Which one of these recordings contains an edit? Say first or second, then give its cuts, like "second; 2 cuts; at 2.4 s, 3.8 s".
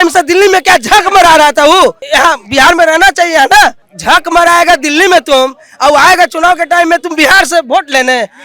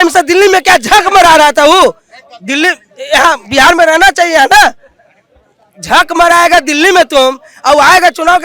first; 2 cuts; at 2.0 s, 3.9 s